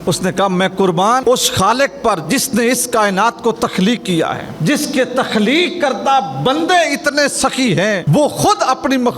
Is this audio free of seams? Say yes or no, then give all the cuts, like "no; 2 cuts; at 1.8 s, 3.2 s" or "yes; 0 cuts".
no; 3 cuts; at 1.2 s, 4.5 s, 8.0 s